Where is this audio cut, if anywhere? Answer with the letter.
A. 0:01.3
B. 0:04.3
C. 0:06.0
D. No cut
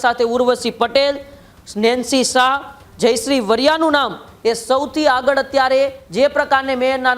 C